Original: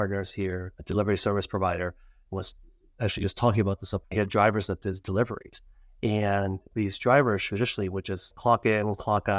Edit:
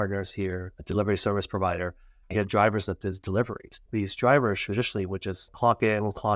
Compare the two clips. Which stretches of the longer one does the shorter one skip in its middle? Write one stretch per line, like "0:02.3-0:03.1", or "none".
0:02.2-0:04.0
0:05.6-0:06.6